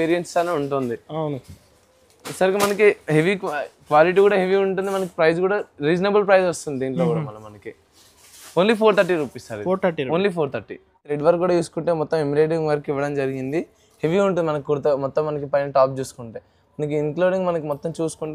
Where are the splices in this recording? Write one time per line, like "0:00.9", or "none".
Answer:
0:11.1

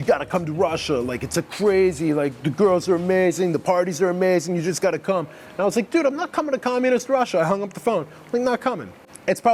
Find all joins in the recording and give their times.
none

